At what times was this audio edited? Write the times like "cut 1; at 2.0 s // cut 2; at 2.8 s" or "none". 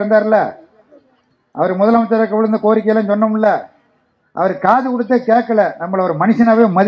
none